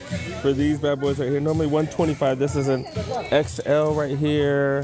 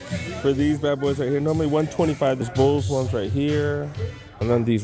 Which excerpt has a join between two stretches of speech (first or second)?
second